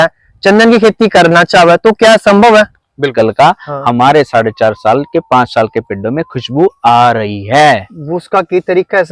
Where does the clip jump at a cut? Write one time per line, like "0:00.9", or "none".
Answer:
0:03.1